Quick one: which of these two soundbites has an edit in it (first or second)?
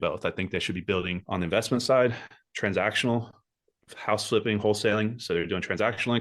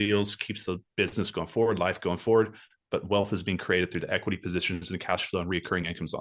first